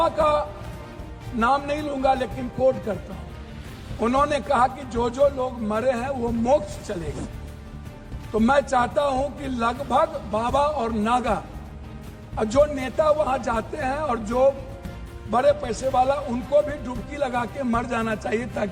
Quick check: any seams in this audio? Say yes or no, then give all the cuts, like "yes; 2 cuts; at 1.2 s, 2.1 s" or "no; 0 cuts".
no; 0 cuts